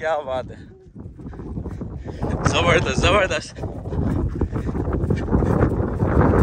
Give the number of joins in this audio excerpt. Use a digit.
0